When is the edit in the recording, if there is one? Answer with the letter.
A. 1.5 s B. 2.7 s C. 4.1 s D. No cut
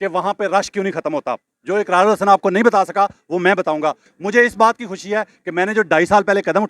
C